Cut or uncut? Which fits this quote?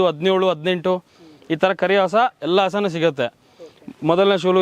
uncut